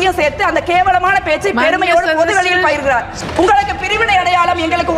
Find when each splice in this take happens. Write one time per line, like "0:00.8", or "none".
0:03.2

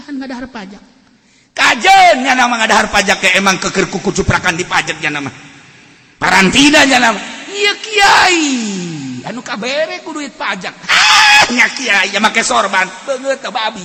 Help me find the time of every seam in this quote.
none

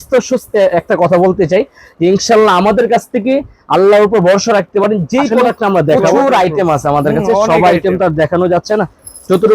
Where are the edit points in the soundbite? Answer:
0:05.9

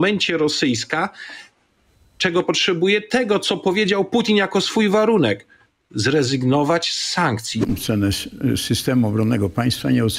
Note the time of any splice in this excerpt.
0:07.6

